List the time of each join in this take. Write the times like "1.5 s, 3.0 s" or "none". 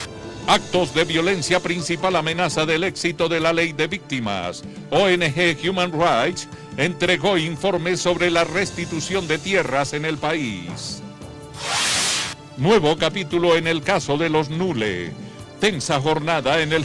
3.4 s